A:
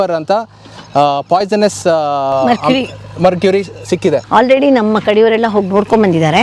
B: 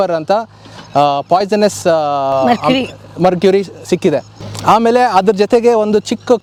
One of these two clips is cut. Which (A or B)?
A